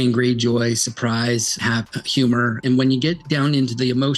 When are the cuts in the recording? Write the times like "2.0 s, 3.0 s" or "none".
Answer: 1.6 s, 2.6 s